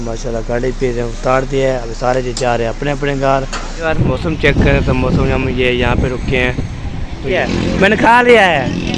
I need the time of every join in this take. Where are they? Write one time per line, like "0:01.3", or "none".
0:03.7
0:07.4